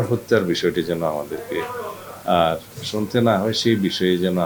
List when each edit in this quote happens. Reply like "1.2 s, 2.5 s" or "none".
none